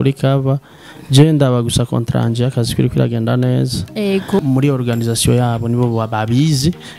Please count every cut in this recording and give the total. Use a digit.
1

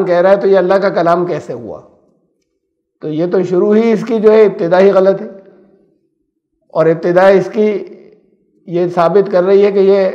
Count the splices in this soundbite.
0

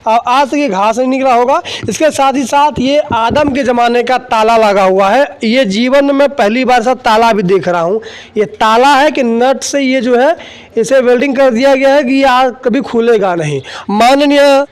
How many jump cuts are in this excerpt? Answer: 1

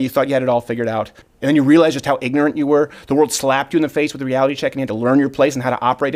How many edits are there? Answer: 1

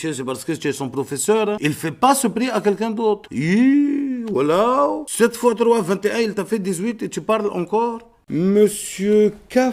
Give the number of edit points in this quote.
3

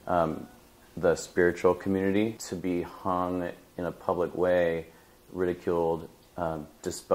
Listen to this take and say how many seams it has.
1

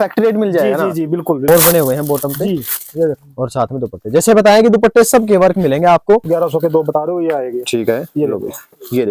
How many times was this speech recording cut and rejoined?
2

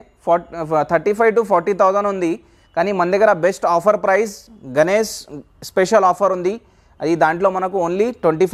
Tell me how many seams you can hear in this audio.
0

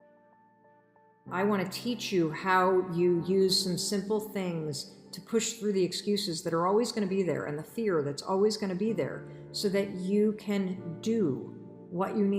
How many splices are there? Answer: 1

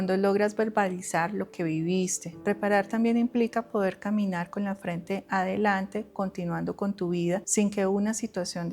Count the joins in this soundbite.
2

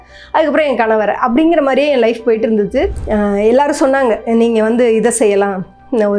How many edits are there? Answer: 1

